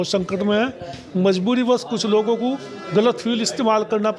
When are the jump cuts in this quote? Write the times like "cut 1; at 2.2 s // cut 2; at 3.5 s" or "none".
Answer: none